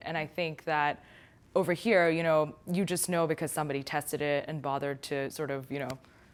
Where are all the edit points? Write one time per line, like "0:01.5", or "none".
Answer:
none